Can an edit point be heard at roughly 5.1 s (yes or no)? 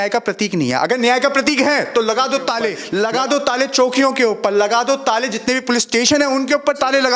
no